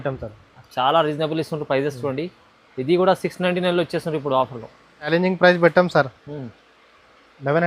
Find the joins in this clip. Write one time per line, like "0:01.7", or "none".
0:05.1